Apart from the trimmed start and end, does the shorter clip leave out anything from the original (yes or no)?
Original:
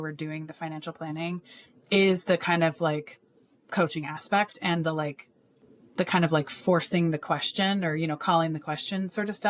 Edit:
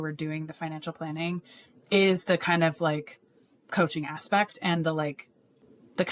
no